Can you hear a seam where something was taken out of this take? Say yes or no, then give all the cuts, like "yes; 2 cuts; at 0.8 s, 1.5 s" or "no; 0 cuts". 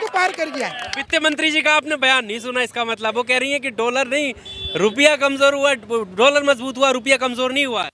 no; 0 cuts